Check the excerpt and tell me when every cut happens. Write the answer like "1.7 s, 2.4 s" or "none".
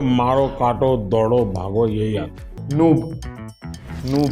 2.5 s